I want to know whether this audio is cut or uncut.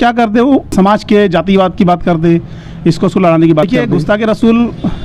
cut